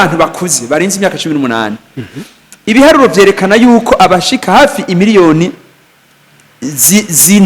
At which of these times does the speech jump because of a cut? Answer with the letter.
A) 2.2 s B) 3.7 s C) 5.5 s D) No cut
D